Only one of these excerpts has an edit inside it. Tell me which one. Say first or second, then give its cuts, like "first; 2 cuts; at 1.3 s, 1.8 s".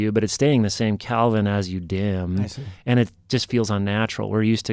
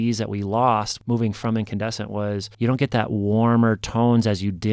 second; 2 cuts; at 0.9 s, 2.5 s